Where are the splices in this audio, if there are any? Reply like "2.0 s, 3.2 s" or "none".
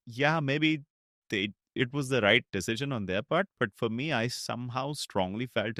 none